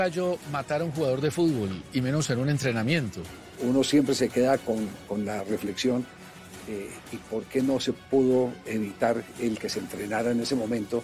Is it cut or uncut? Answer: cut